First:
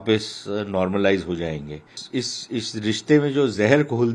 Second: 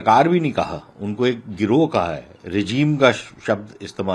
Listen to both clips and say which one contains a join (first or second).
first